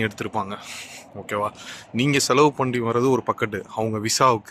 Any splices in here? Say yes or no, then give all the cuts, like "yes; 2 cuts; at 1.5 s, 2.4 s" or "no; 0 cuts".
no; 0 cuts